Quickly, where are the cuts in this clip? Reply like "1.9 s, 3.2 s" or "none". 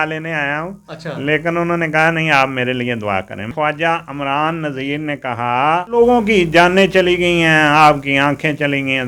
3.5 s, 6.0 s